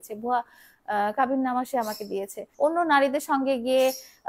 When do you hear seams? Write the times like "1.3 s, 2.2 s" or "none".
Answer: 2.5 s